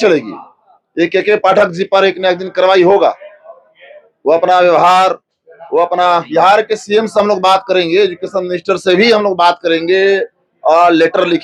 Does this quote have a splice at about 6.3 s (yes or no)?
yes